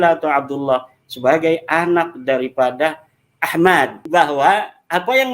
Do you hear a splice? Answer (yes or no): yes